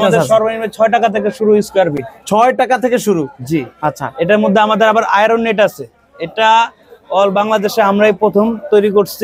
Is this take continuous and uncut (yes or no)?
yes